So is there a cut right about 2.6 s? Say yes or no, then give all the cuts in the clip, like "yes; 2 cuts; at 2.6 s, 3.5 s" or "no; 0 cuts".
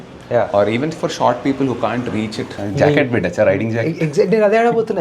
yes; 1 cut; at 2.6 s